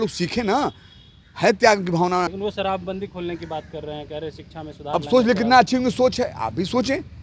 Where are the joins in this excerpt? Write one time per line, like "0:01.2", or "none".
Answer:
0:02.3